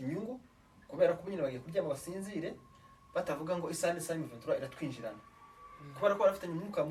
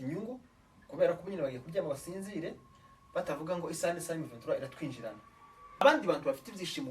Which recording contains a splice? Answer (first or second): second